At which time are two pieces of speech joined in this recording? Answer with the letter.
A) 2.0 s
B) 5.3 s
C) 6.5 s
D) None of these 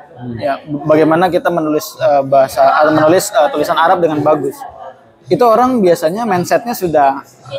D